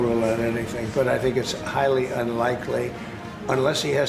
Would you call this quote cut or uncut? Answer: uncut